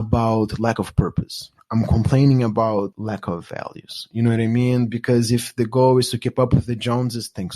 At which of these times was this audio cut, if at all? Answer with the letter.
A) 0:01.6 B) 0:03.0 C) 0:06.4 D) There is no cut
B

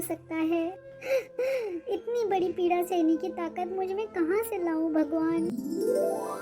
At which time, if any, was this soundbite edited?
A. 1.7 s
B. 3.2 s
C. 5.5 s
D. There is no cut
C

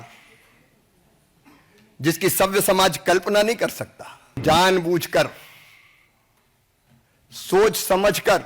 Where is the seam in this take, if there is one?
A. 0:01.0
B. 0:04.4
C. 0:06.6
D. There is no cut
B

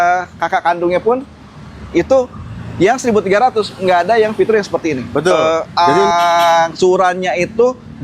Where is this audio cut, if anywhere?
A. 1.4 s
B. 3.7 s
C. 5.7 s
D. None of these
C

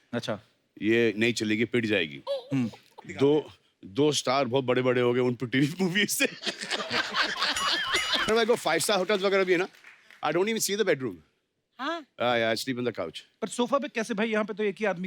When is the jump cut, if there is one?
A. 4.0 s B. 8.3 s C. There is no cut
B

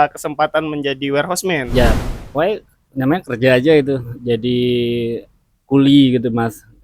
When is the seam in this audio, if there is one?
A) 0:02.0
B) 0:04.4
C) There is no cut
A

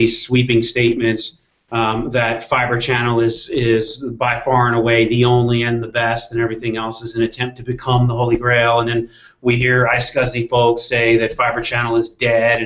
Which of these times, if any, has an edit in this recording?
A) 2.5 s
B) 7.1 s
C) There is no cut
A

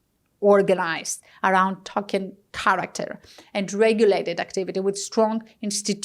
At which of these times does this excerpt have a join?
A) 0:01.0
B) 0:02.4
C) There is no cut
B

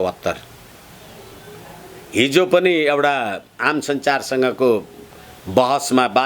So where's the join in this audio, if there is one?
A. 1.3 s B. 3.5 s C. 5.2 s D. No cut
A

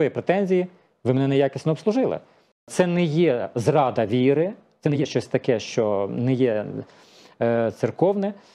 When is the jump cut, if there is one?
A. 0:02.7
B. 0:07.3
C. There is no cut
A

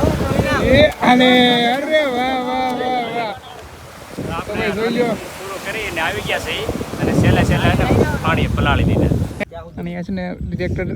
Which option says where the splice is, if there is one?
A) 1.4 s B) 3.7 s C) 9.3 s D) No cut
C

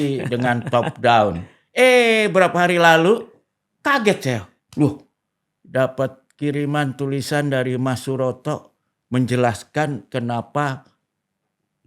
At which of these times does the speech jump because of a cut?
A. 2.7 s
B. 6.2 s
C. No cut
C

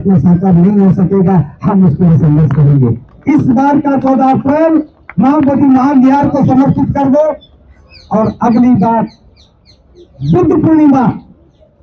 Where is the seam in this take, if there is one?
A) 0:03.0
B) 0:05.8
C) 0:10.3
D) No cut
D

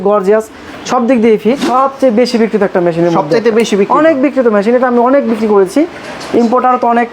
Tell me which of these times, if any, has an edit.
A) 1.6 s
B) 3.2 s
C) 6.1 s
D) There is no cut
A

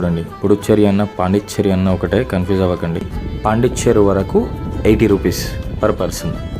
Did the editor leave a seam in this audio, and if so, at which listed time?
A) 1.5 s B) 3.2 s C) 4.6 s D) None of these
B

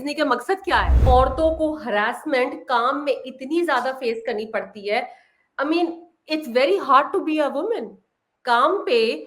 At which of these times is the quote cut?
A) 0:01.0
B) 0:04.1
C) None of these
A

